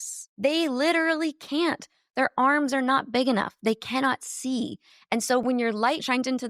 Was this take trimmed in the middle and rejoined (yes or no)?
no